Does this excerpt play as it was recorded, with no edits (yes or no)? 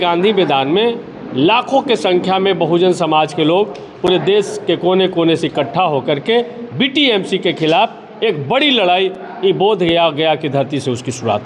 yes